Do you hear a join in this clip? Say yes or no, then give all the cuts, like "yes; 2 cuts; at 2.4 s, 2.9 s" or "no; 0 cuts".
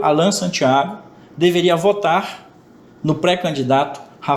no; 0 cuts